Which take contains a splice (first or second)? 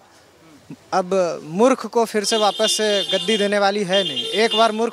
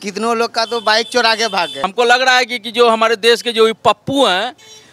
second